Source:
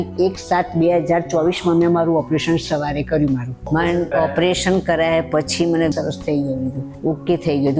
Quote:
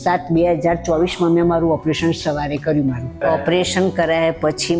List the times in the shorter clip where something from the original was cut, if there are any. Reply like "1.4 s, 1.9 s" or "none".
3.2 s